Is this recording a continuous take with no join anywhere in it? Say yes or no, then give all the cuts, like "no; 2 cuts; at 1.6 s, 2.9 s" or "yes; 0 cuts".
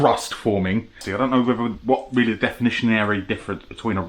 no; 1 cut; at 1.1 s